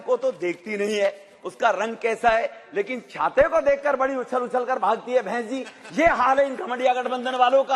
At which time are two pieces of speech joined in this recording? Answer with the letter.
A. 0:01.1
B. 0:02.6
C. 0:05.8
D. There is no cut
D